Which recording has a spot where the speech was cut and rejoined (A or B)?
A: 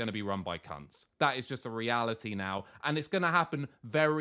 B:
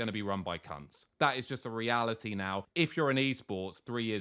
B